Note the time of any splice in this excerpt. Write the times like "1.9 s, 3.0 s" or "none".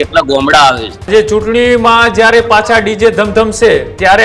1.1 s